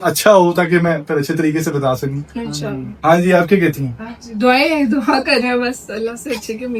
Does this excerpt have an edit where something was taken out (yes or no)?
no